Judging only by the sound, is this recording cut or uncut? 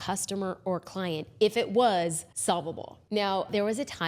cut